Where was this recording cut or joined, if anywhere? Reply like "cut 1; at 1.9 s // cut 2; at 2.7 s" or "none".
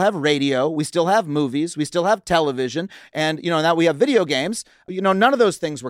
cut 1; at 4.9 s